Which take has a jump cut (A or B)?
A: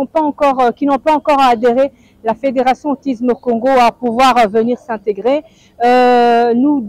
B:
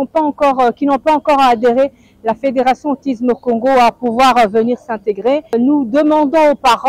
B